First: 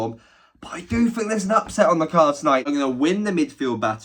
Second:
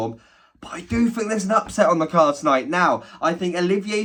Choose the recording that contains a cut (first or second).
first